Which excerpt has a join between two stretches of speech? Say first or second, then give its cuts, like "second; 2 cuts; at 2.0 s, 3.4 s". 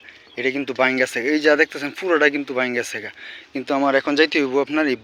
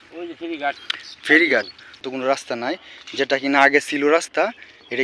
second; 1 cut; at 2.0 s